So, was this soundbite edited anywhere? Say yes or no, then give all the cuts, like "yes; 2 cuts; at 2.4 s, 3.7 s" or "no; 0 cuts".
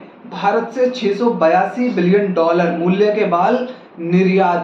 no; 0 cuts